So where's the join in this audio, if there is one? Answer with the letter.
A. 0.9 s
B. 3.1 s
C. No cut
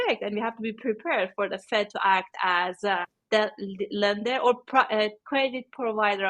B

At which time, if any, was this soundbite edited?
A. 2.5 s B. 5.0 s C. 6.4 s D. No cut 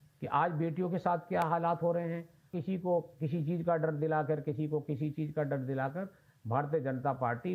A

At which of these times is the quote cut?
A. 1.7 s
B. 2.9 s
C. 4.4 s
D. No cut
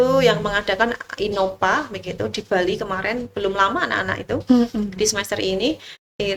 D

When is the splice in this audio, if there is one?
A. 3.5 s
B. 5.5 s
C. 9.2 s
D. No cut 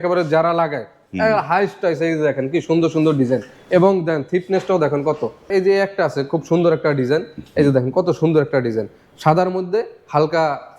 B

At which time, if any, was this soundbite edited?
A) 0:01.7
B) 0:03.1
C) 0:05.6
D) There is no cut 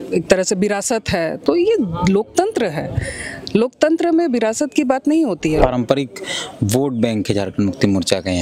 C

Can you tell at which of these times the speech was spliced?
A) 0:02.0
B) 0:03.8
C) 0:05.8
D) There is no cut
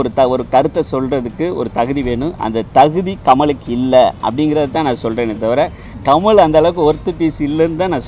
C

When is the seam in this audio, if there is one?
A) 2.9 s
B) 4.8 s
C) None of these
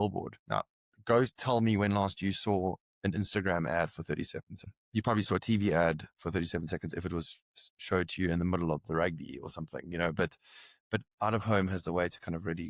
B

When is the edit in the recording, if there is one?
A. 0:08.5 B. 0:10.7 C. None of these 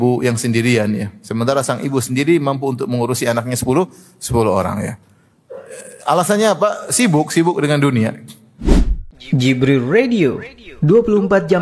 A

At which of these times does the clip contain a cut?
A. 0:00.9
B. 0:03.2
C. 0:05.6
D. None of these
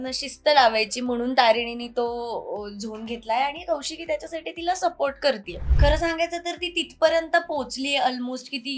C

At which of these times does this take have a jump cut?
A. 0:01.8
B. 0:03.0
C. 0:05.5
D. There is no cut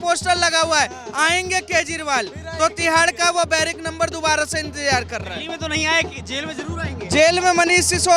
D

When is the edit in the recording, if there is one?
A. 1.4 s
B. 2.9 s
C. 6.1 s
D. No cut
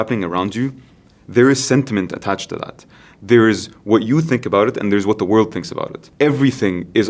D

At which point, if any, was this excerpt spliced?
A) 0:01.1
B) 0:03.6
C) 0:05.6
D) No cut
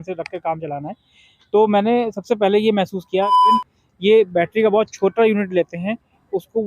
B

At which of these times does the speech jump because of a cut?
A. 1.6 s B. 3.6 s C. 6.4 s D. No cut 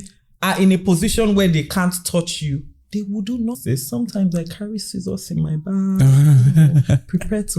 B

